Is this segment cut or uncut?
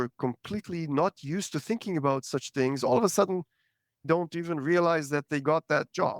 cut